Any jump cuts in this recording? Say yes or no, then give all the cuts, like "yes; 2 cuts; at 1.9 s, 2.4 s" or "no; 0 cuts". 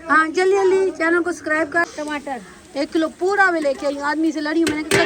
yes; 1 cut; at 1.9 s